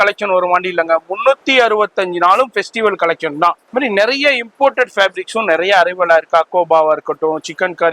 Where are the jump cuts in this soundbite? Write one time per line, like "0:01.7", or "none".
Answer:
0:03.6